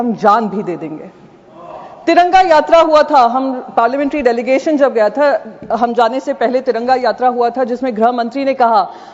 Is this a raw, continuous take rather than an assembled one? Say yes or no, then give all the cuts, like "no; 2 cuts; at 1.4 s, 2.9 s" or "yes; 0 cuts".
yes; 0 cuts